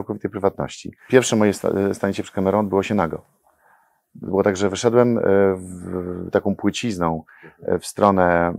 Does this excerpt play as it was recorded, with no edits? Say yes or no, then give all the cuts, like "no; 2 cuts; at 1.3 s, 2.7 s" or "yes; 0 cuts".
no; 1 cut; at 0.9 s